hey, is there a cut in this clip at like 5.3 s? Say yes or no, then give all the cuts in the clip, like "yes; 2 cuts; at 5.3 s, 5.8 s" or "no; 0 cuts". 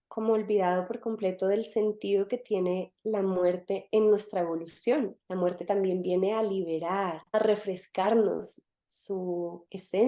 no; 1 cut; at 7.3 s